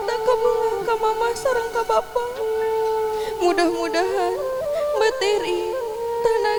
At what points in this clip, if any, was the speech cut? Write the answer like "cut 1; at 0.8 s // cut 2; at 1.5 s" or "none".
none